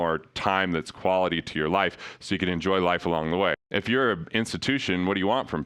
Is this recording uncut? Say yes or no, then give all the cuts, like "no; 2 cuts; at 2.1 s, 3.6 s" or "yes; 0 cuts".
no; 1 cut; at 3.6 s